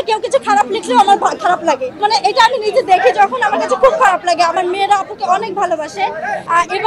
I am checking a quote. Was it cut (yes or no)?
no